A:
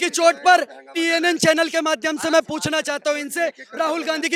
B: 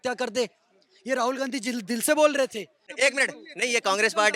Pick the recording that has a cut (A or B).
B